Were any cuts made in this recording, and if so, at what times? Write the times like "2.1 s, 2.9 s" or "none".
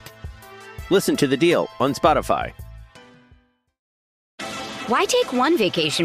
4.4 s